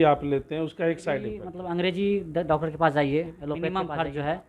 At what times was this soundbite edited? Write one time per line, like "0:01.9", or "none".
0:01.5
0:03.5